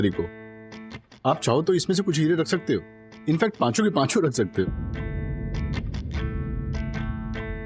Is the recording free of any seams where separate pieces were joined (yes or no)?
yes